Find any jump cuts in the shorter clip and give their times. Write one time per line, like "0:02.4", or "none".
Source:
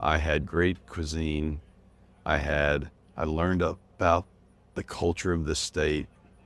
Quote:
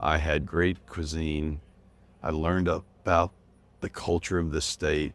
0:02.1

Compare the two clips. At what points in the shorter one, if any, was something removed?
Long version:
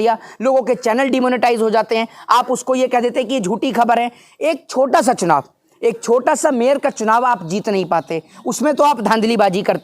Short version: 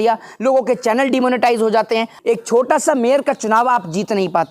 0:02.1

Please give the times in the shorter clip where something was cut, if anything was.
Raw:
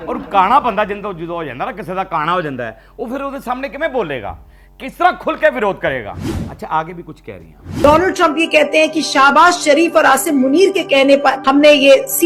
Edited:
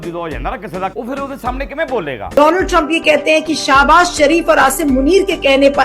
0:00.9
0:02.3

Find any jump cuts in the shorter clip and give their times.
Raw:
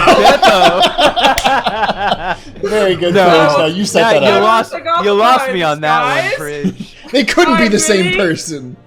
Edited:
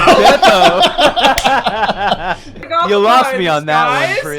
0:02.6

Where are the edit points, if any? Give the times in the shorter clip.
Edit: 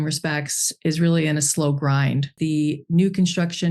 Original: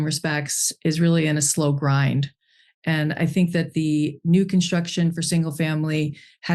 0:02.3

